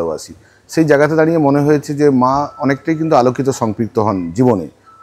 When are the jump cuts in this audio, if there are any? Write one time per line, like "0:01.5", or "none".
none